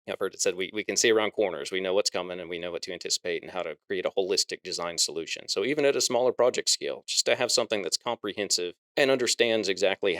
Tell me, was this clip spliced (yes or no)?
yes